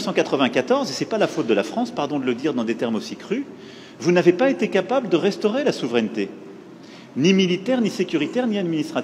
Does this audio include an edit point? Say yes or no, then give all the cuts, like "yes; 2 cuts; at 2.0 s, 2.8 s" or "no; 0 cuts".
no; 0 cuts